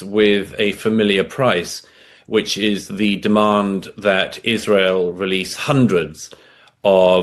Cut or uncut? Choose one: uncut